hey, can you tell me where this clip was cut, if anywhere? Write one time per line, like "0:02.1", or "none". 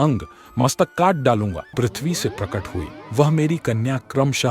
0:01.7